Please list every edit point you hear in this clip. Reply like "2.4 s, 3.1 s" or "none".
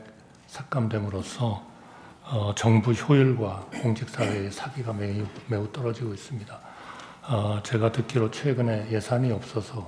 none